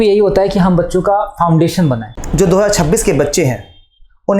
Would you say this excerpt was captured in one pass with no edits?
no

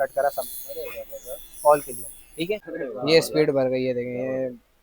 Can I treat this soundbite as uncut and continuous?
no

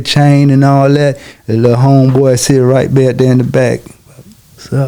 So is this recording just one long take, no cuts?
yes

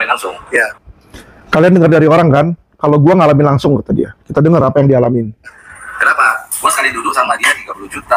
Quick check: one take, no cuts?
yes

